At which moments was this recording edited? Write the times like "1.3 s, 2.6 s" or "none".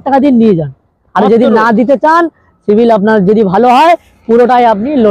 none